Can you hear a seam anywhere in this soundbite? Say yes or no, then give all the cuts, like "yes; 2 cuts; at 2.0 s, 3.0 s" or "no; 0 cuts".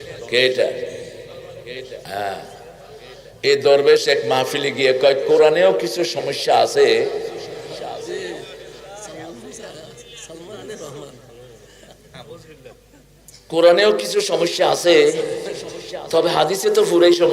no; 0 cuts